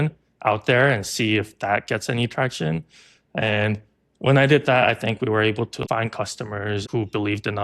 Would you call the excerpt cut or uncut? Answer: cut